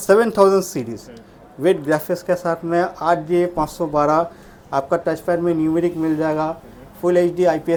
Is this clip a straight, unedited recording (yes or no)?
yes